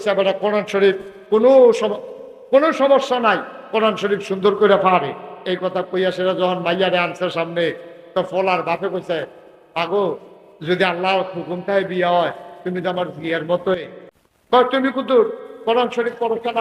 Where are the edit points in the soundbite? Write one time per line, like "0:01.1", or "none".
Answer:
0:13.8